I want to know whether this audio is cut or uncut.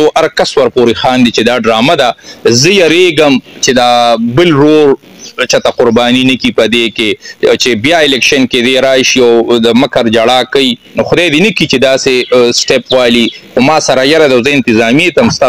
uncut